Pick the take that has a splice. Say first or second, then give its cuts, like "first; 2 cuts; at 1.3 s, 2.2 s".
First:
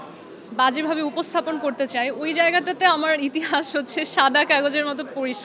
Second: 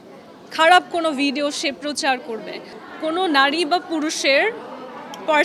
second; 1 cut; at 2.7 s